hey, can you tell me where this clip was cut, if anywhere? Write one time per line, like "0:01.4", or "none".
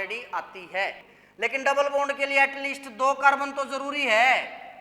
0:01.1